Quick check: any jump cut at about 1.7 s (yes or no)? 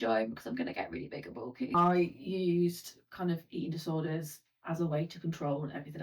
yes